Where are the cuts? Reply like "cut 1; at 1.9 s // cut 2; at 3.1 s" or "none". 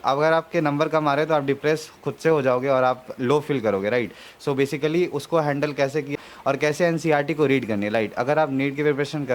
cut 1; at 6.1 s